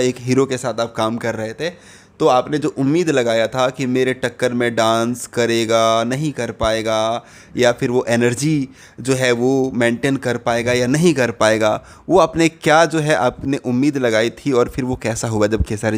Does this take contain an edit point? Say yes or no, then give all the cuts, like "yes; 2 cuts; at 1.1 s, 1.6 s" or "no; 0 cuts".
no; 0 cuts